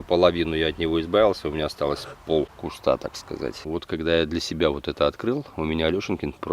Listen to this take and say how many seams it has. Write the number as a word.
two